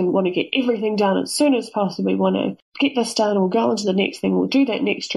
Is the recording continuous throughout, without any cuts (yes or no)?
no